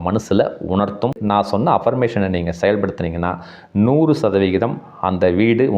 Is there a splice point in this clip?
yes; 1 cut; at 1.2 s

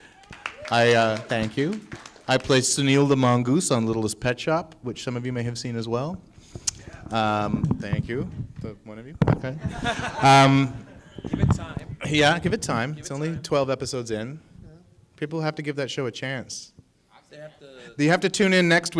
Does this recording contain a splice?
yes; 1 cut; at 14.2 s

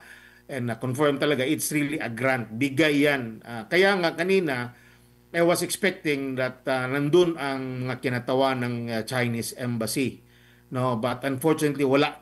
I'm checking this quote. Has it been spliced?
no; 0 cuts

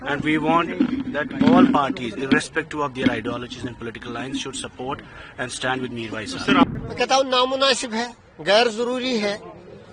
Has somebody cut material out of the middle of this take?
yes; 1 cut; at 6.6 s

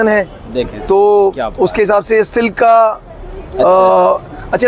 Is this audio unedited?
yes; 0 cuts

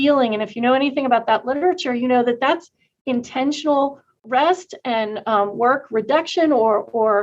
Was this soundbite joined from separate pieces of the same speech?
no; 0 cuts

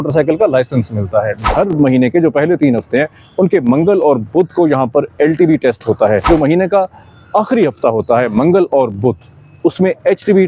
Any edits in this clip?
yes; 2 cuts; at 1.4 s, 6.3 s

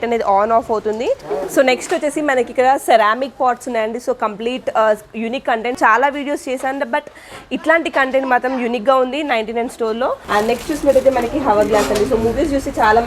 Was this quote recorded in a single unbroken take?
no; 3 cuts; at 1.3 s, 5.8 s, 10.2 s

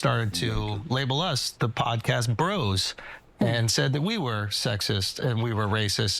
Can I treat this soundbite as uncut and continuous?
no; 1 cut; at 3.7 s

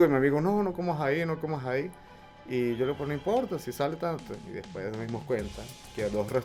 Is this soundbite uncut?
yes; 0 cuts

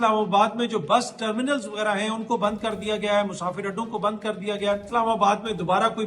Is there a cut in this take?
yes; 1 cut; at 4.9 s

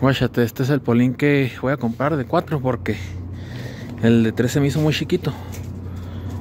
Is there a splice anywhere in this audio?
no; 0 cuts

